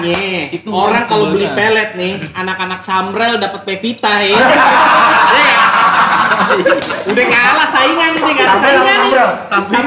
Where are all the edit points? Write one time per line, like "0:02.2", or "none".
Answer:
none